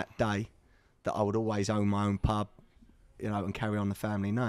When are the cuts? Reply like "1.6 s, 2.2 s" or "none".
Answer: none